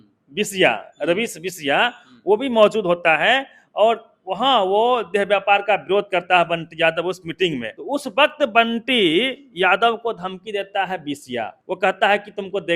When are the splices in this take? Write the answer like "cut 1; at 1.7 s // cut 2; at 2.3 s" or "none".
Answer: cut 1; at 7.7 s // cut 2; at 11.6 s